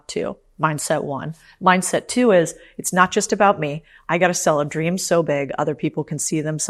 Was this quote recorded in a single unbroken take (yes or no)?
yes